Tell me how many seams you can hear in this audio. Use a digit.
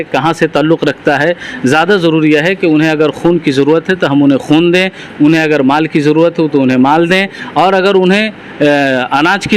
0